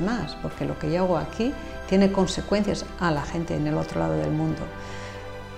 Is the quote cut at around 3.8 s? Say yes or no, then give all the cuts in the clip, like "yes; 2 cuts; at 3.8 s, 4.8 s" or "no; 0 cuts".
no; 0 cuts